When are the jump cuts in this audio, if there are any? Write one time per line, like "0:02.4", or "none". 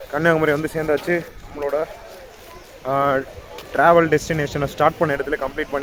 none